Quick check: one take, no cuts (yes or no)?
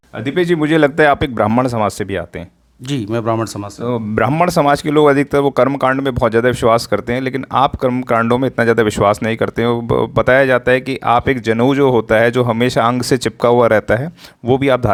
yes